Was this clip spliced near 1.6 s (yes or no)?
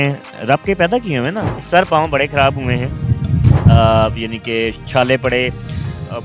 yes